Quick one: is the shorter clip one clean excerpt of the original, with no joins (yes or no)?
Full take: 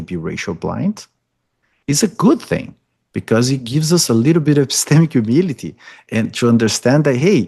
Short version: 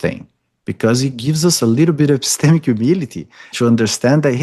no